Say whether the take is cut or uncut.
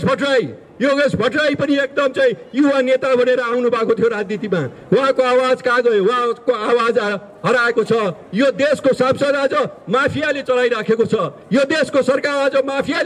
uncut